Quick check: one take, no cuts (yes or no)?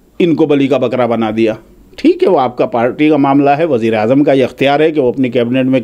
yes